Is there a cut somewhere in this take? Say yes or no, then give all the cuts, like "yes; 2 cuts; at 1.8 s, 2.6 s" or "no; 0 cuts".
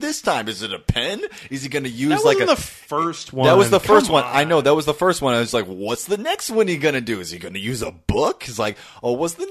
no; 0 cuts